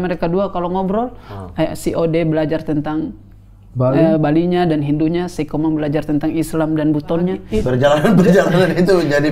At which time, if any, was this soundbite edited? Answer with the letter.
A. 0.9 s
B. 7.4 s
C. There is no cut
B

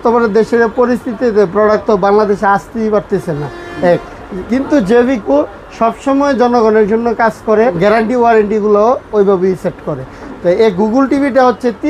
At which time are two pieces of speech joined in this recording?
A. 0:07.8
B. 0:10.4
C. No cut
A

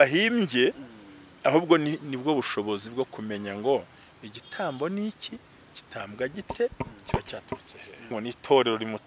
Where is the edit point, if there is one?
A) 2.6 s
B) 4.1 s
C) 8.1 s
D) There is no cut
C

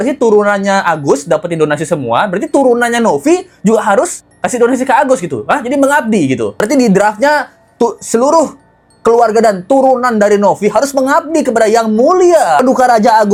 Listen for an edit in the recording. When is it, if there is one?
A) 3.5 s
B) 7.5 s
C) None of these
C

